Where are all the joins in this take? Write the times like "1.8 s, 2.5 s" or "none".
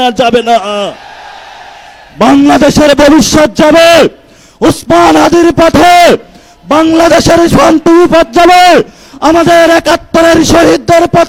none